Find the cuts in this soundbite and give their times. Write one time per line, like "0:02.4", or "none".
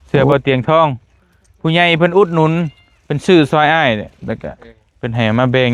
none